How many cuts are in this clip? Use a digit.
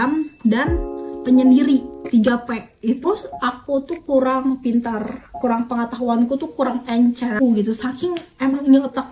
2